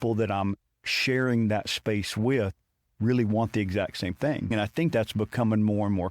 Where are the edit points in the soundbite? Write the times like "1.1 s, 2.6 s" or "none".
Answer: 4.5 s